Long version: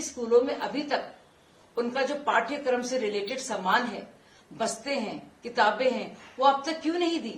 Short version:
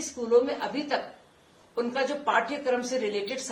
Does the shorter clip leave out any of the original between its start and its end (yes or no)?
no